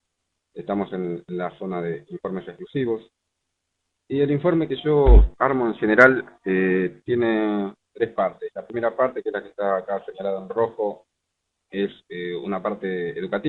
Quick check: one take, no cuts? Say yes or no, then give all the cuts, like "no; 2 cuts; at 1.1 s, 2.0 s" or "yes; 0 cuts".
yes; 0 cuts